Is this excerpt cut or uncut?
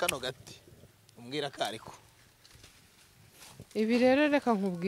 uncut